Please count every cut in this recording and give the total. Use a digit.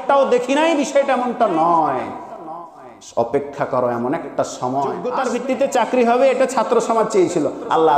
1